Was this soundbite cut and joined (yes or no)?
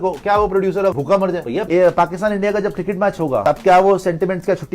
yes